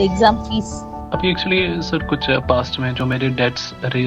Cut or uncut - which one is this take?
cut